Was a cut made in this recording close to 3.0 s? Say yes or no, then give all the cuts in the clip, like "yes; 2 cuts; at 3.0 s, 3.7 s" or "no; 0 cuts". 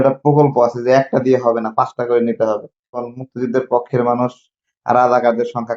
yes; 1 cut; at 3.0 s